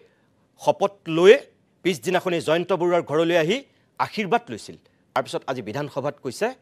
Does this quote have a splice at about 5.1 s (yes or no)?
yes